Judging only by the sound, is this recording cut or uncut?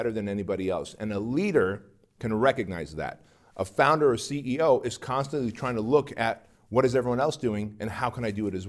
uncut